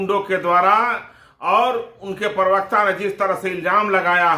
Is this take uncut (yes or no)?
yes